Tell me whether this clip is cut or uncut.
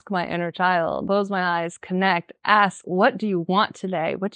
cut